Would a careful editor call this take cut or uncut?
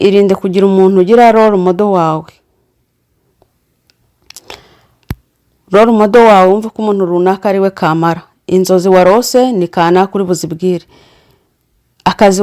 uncut